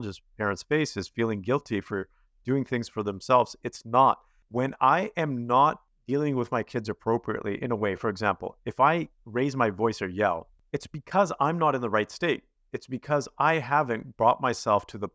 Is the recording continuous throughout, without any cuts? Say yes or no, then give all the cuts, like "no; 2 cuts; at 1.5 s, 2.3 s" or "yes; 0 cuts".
no; 3 cuts; at 4.3 s, 5.9 s, 10.5 s